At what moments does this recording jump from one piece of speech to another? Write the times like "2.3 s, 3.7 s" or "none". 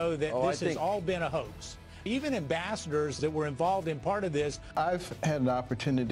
2.0 s, 3.0 s, 4.7 s